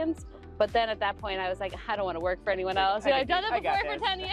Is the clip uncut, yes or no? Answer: yes